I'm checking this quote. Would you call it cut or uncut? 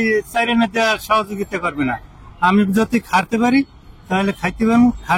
uncut